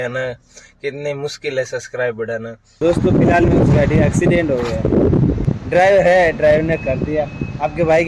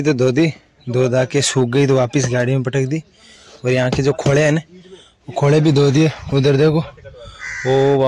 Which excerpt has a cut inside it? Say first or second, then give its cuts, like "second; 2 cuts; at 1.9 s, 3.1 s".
first; 2 cuts; at 2.7 s, 5.4 s